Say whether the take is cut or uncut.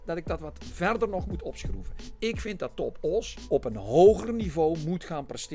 cut